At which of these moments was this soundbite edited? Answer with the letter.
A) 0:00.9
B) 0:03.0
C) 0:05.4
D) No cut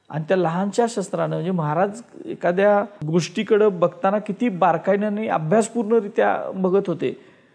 B